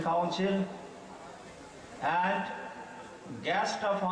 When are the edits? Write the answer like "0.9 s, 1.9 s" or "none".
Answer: none